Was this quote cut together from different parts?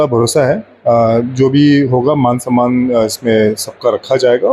no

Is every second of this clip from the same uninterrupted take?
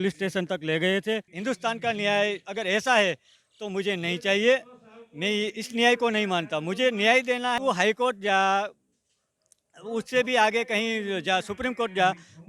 no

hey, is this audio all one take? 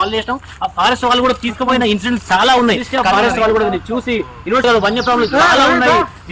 no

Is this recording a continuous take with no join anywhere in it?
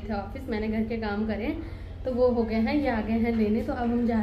yes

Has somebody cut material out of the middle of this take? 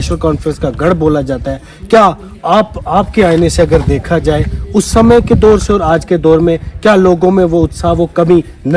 no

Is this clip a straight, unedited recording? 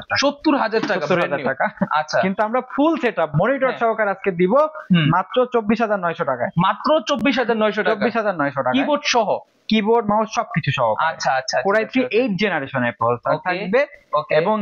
yes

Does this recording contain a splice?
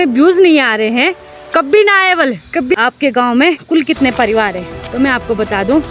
yes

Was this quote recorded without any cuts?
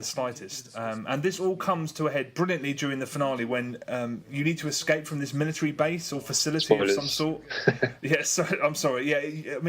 no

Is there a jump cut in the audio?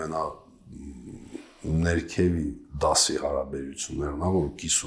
no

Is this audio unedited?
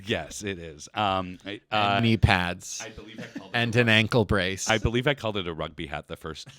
yes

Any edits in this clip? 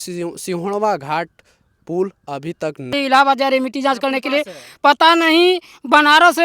yes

